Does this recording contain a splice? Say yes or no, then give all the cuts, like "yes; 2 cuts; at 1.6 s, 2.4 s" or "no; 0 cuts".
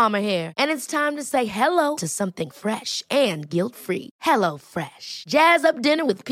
no; 0 cuts